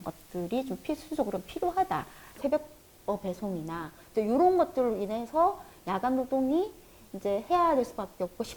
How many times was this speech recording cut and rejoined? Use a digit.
2